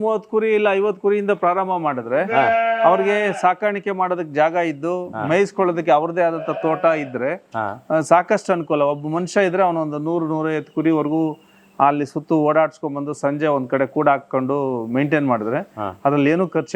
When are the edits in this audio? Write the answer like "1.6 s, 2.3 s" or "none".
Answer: none